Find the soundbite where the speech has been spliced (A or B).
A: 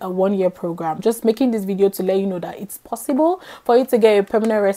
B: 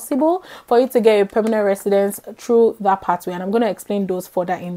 A